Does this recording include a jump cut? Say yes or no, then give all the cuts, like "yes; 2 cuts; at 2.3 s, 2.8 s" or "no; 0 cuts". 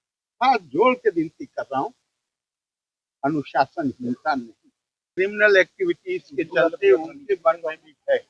yes; 1 cut; at 5.2 s